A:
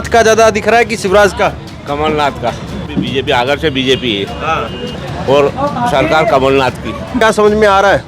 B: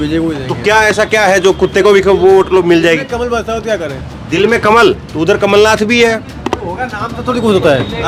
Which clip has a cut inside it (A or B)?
A